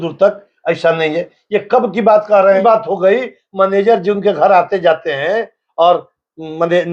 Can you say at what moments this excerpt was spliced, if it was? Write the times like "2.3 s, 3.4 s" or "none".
2.6 s